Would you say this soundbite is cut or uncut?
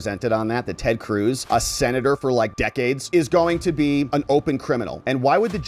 uncut